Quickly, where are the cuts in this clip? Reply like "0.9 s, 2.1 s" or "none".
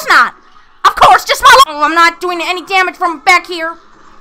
1.7 s